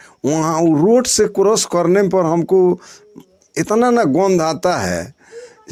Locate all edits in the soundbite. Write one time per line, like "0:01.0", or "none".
none